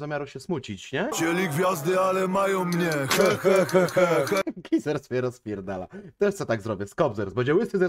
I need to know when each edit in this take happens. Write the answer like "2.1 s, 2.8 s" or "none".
1.2 s, 4.4 s